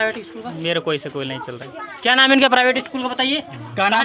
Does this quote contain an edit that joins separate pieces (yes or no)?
no